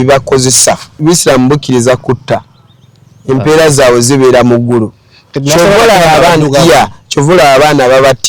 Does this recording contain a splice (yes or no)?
yes